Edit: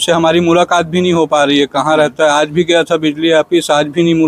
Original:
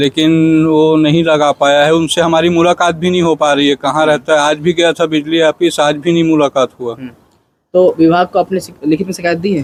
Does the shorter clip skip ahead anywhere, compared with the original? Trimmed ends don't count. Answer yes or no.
no